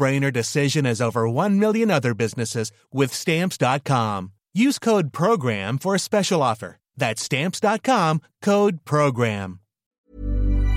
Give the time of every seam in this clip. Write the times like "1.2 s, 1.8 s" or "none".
none